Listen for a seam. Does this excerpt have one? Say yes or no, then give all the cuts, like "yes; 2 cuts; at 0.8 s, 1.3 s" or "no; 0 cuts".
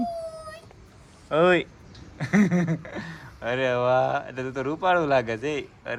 no; 0 cuts